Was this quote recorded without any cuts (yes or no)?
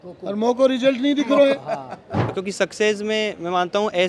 no